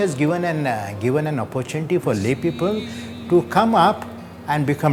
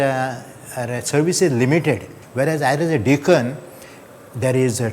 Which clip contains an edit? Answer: second; 1 cut; at 2.2 s

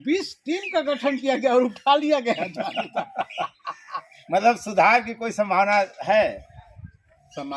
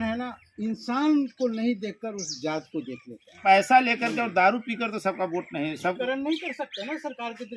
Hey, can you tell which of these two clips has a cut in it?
second; 2 cuts; at 3.4 s, 6.0 s

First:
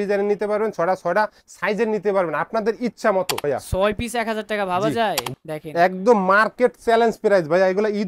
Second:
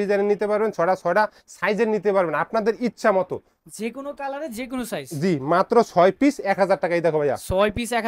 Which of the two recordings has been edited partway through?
first; 2 cuts; at 3.4 s, 5.3 s

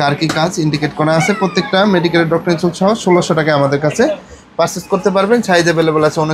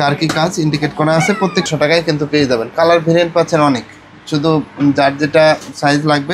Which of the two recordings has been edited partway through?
second; 1 cut; at 1.7 s

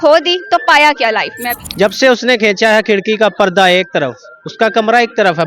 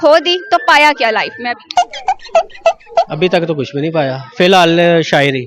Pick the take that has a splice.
first; 1 cut; at 1.6 s

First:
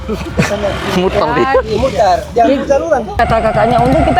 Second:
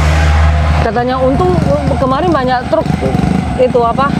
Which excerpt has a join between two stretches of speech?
first; 1 cut; at 3.2 s

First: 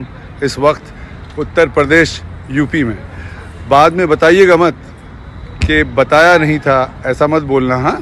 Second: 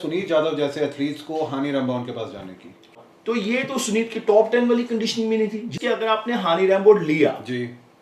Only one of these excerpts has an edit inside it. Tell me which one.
second; 2 cuts; at 3.0 s, 5.8 s

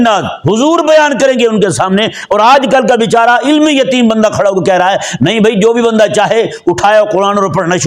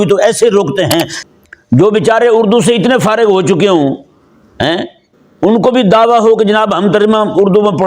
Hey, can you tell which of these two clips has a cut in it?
second; 1 cut; at 1.2 s

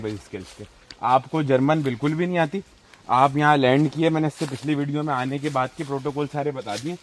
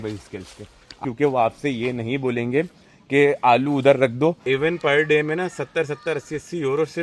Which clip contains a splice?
second; 2 cuts; at 1.0 s, 4.4 s

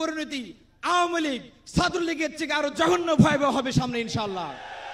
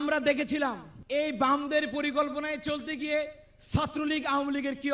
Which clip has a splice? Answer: second; 1 cut; at 0.9 s

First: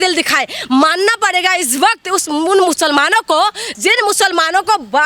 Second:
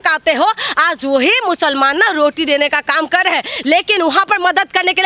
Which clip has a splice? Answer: second; 1 cut; at 3.5 s

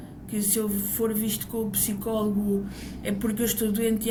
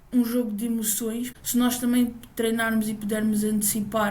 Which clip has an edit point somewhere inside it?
second; 1 cut; at 1.4 s

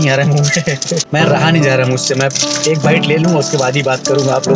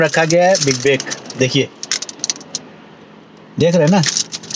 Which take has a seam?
first; 1 cut; at 1.1 s

